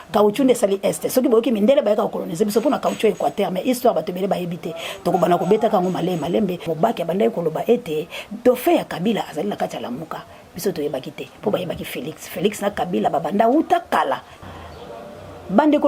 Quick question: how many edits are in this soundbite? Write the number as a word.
two